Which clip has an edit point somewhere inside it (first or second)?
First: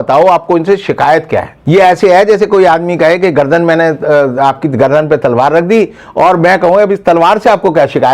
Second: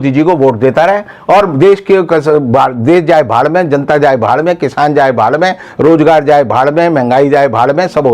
first